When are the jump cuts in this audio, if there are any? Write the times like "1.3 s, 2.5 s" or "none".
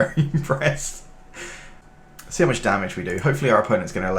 1.8 s